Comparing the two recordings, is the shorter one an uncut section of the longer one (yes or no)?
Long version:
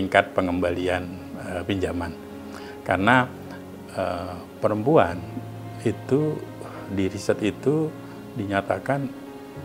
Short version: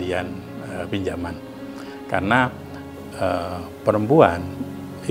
yes